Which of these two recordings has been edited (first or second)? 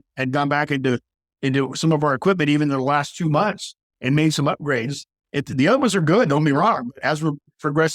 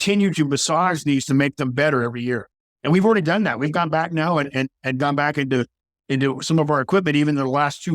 second